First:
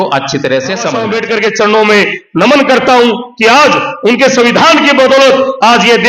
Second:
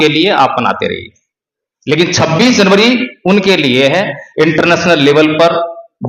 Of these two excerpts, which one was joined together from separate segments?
first; 1 cut; at 1.1 s

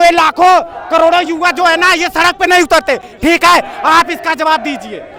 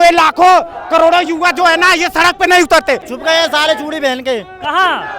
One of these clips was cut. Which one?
second; 1 cut; at 3.1 s

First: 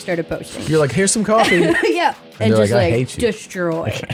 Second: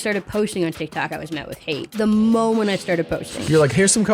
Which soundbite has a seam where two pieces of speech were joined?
second; 1 cut; at 1.9 s

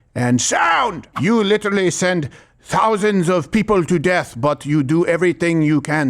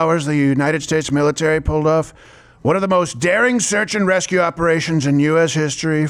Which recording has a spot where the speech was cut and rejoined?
first; 1 cut; at 1.1 s

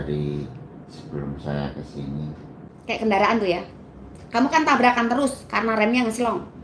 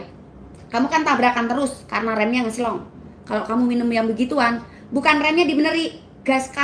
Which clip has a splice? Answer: first; 1 cut; at 2.6 s

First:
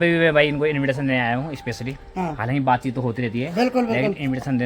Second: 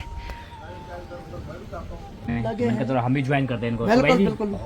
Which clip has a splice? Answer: second; 1 cut; at 2.3 s

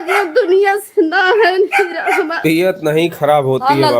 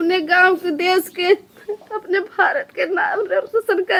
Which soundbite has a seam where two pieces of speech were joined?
first; 1 cut; at 2.4 s

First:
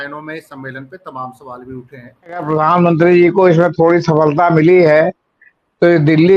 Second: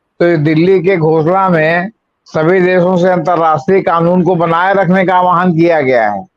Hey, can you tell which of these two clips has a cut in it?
first; 1 cut; at 2.5 s

